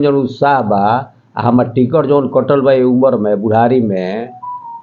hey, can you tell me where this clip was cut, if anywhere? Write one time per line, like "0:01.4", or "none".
none